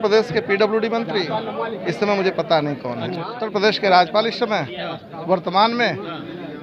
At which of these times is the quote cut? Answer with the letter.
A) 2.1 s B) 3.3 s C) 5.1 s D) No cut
B